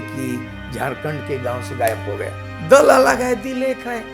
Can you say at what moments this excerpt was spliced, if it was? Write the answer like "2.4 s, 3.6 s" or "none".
2.5 s